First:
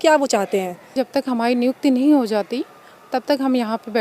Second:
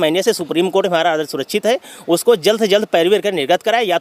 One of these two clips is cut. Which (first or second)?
first